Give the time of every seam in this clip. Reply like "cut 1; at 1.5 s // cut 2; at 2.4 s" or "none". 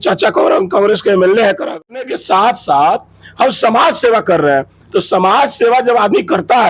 cut 1; at 1.8 s